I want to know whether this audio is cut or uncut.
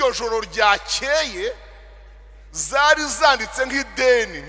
uncut